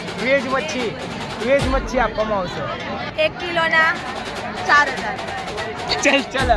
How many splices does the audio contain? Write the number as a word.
one